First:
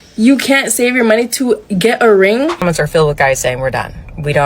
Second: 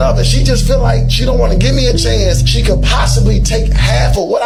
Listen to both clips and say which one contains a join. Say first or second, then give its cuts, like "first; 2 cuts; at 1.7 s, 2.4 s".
first; 1 cut; at 2.6 s